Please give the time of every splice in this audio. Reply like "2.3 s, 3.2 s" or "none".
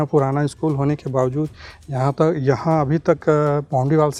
none